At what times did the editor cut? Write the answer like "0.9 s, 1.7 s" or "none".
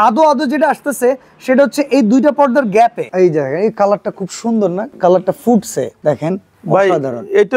3.0 s, 4.9 s, 5.9 s